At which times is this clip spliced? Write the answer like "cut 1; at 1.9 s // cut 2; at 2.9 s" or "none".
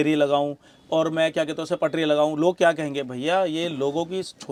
none